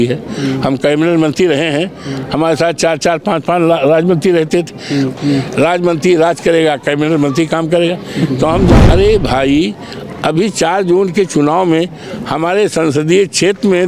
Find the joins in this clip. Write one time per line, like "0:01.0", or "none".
0:05.2
0:08.8